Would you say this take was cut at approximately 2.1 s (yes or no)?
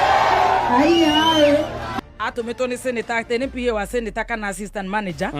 yes